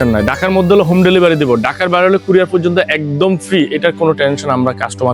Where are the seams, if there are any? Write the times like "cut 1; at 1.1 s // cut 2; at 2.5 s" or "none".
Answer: none